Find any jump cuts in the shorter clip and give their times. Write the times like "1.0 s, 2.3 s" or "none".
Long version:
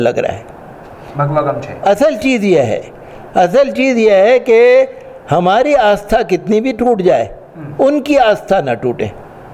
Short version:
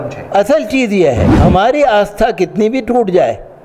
1.3 s

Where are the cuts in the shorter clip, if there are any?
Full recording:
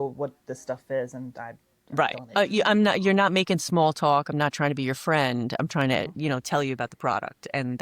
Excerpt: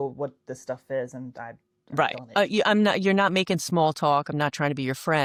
none

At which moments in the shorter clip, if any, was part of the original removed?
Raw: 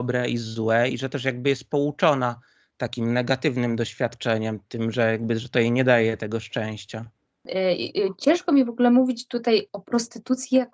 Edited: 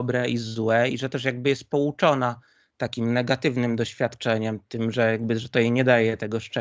none

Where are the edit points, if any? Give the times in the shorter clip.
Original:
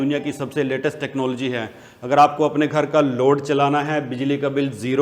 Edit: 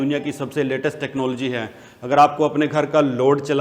none

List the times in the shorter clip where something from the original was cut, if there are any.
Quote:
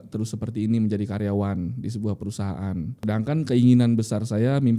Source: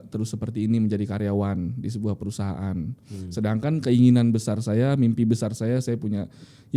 3.0 s

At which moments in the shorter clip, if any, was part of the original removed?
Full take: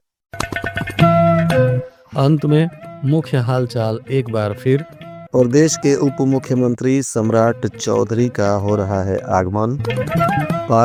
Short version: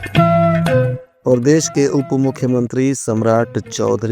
1.0 s

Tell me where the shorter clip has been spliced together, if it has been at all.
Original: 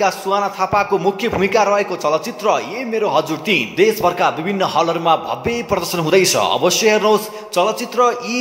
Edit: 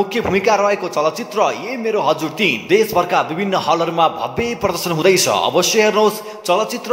none

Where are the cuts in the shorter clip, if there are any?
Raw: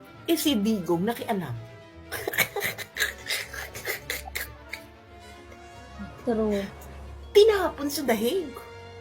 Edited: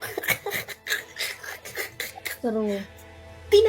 2.4 s

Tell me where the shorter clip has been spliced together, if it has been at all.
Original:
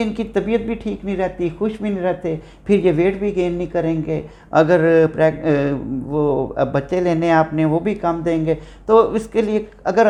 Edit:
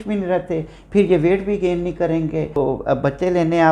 2.6 s

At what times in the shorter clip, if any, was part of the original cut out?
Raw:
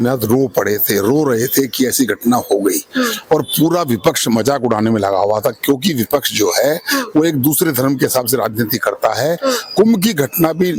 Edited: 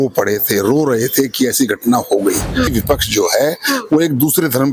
2.7 s

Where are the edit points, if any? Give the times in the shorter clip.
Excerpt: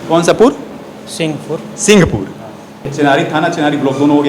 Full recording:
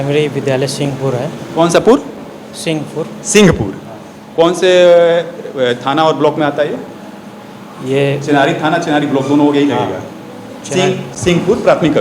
2.9 s

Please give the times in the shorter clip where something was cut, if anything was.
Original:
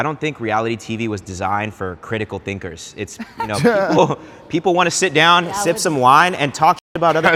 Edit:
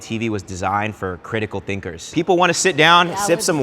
2.0 s

